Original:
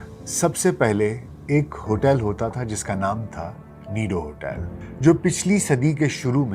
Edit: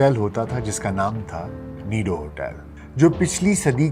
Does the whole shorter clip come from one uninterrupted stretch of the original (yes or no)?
yes